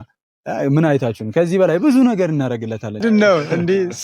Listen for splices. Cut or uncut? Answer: cut